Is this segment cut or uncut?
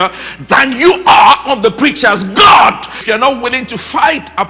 cut